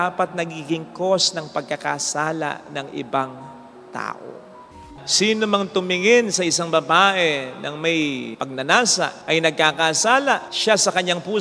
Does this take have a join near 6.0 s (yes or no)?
no